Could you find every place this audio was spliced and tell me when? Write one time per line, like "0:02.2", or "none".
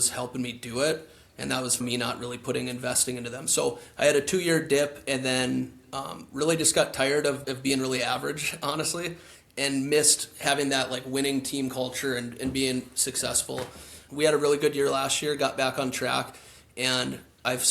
0:01.8
0:07.4
0:14.0